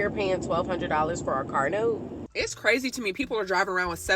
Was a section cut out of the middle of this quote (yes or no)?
yes